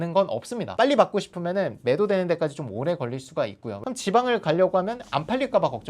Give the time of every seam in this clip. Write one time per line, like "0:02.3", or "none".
0:03.7

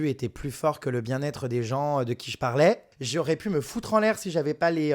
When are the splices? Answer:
0:02.9

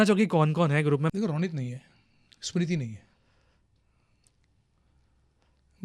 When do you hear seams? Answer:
0:01.0

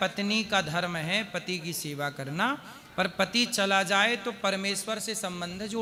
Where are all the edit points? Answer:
none

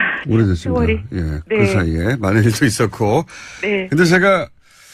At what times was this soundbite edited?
0:01.5

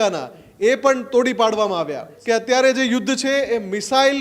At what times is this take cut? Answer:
0:02.1

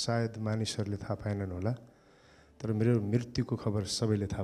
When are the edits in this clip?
none

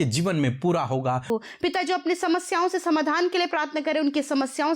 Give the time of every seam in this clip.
0:01.3

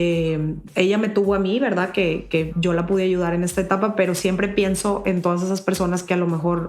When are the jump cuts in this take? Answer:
none

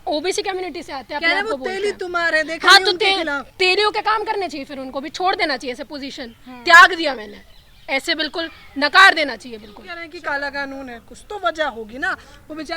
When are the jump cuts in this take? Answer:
0:10.0

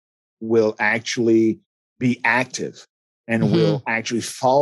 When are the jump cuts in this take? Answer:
0:01.7

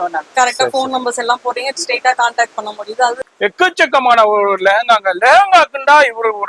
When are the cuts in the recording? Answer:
0:03.3

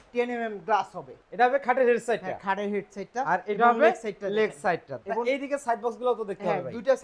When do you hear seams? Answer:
0:01.1
0:04.9

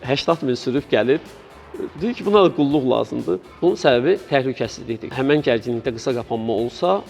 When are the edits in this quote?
0:03.5
0:05.1

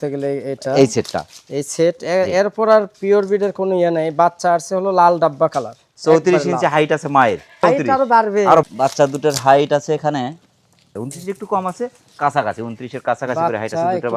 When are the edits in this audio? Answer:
none

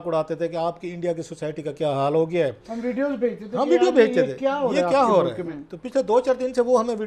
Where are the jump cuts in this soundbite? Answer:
none

